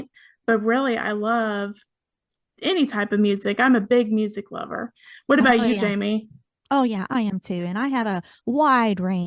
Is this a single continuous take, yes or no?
yes